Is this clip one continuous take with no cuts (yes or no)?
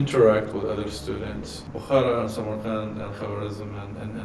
no